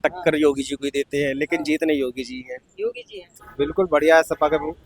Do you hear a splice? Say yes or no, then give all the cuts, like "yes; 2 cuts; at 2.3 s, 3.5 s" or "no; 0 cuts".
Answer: yes; 1 cut; at 3.3 s